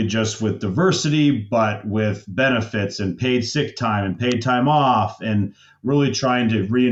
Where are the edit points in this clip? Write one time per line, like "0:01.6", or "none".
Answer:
none